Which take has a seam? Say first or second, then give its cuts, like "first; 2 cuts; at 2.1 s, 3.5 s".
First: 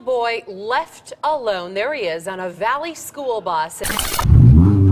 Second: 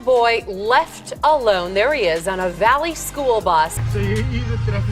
second; 1 cut; at 3.8 s